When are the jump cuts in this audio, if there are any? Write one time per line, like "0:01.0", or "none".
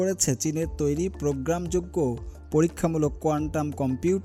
none